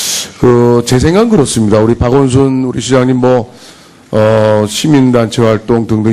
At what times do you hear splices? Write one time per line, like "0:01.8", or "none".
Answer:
0:01.6